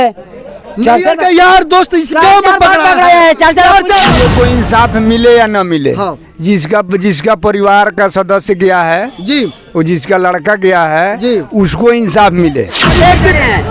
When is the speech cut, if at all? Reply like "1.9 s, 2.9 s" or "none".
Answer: 4.1 s, 12.9 s

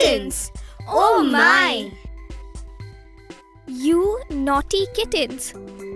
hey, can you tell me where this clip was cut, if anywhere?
none

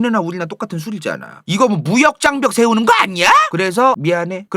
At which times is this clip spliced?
1.4 s

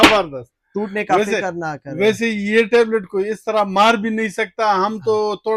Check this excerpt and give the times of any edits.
none

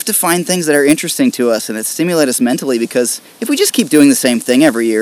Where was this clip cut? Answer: 3.3 s

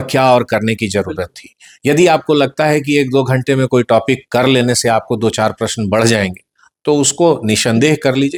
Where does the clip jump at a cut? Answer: none

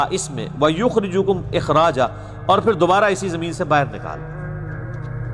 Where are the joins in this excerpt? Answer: none

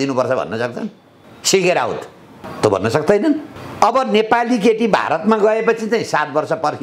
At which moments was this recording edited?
3.5 s

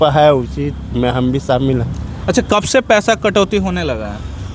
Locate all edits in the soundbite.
none

